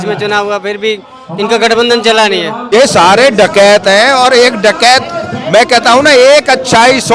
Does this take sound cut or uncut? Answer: cut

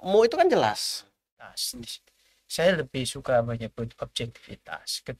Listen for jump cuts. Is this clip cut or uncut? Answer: cut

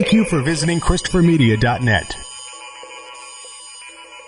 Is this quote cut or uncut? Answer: uncut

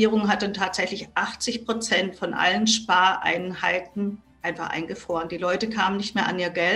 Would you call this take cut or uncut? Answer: uncut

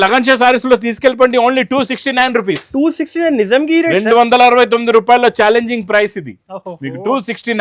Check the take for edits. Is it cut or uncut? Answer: uncut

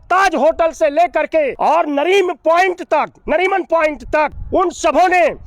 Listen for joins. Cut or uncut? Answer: cut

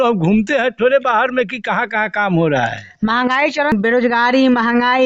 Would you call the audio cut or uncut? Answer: cut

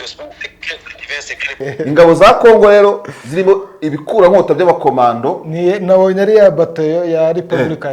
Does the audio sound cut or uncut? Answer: cut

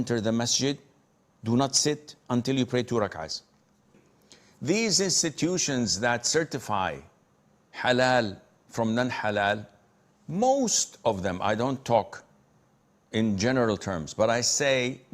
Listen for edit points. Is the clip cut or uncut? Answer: cut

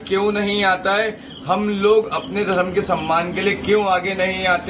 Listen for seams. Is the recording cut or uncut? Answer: uncut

